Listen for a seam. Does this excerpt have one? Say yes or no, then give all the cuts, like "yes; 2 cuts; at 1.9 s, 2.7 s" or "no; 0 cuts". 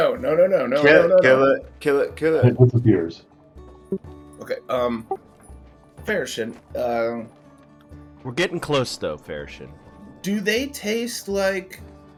no; 0 cuts